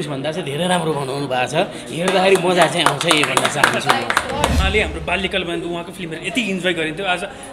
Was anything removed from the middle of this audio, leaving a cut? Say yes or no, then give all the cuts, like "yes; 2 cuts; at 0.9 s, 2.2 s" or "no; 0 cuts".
yes; 1 cut; at 4.6 s